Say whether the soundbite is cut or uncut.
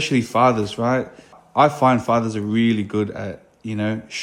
cut